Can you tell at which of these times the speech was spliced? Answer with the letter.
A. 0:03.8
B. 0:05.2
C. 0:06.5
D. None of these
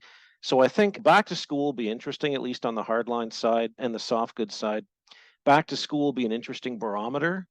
A